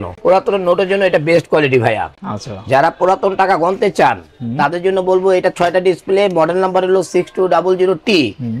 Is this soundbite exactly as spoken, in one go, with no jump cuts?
yes; 0 cuts

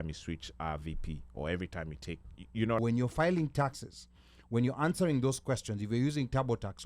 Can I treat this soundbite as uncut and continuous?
no; 1 cut; at 2.8 s

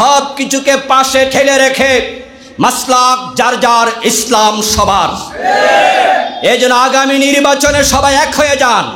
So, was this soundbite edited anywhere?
no; 0 cuts

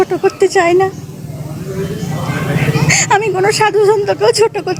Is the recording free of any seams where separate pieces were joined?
yes; 0 cuts

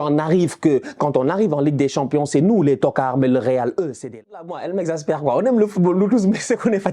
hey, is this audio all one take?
no; 1 cut; at 4.5 s

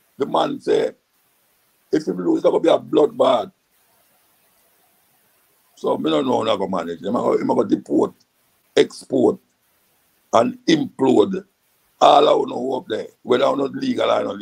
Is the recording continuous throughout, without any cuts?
yes; 0 cuts

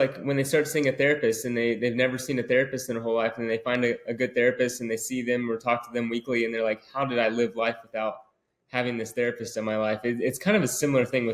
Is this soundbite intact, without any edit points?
yes; 0 cuts

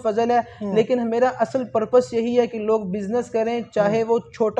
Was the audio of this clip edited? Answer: no; 0 cuts

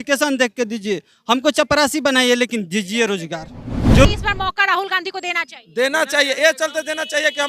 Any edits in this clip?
yes; 1 cut; at 4.1 s

